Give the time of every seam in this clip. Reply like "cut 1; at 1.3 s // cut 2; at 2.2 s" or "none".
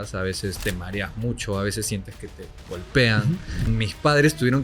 cut 1; at 3.7 s